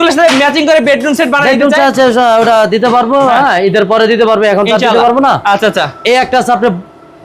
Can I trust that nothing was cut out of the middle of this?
yes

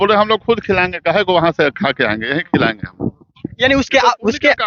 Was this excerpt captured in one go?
yes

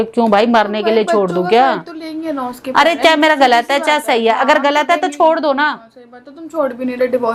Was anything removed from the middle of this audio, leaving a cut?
no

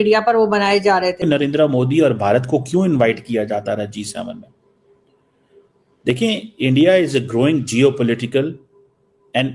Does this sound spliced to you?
yes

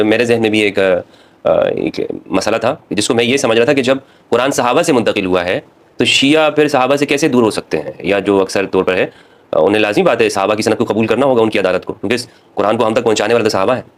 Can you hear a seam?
no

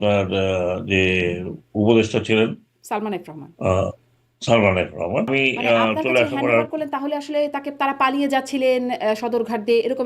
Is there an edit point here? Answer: yes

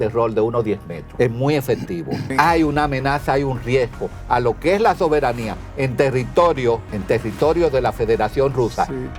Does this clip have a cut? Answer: yes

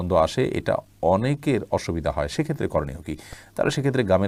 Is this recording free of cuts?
yes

